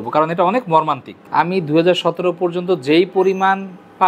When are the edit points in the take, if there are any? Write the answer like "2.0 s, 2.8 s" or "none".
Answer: 1.1 s